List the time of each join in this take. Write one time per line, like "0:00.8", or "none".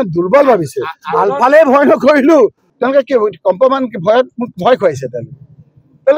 0:02.7